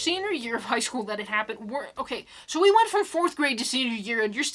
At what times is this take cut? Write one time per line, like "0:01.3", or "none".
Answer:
none